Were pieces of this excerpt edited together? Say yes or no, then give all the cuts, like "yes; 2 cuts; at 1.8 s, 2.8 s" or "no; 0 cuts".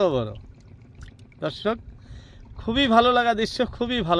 no; 0 cuts